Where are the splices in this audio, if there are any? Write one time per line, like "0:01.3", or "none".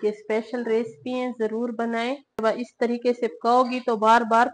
0:02.3